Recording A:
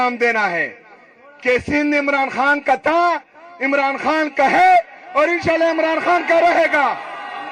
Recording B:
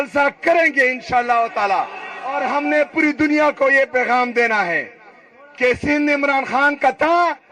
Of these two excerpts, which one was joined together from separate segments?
B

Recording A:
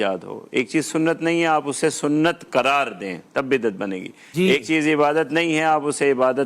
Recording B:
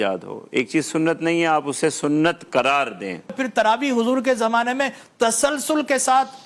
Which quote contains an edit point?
B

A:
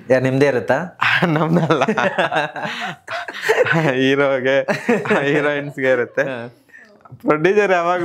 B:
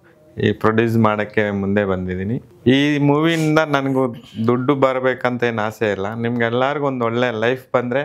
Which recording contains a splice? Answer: B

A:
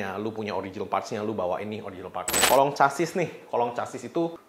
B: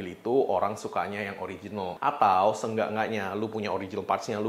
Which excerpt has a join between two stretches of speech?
A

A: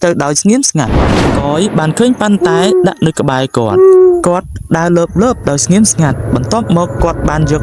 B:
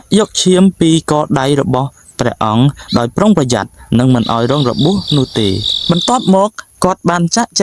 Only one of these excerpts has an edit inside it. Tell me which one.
A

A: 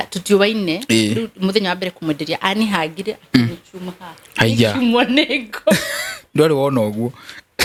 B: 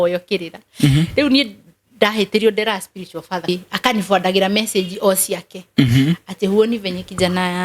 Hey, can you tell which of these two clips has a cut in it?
B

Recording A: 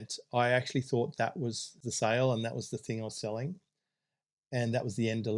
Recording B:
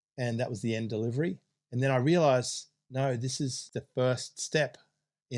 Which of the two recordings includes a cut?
B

